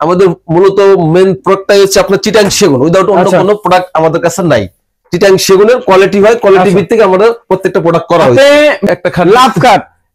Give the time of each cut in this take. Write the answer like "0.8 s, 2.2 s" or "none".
8.8 s